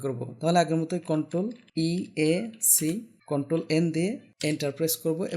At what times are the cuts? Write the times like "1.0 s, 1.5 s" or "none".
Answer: 1.6 s, 3.1 s, 4.3 s

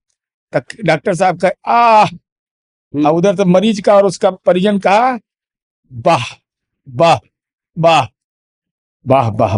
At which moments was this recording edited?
none

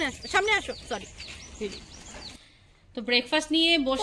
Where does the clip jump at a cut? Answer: 2.2 s

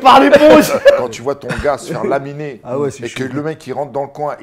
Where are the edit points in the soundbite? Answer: 1.0 s

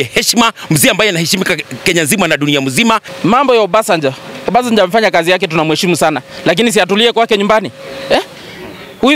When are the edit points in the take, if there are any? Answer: 3.1 s

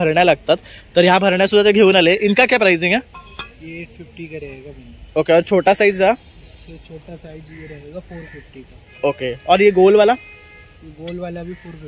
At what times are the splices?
none

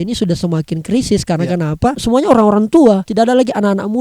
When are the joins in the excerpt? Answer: 2.0 s, 3.1 s

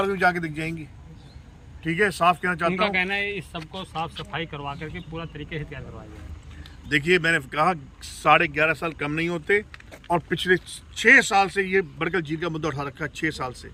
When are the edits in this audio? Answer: none

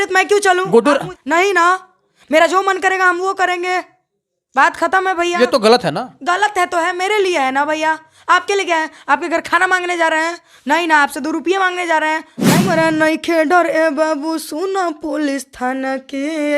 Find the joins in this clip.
12.6 s

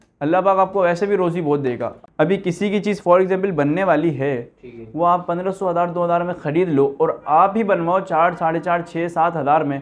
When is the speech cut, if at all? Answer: 1.9 s

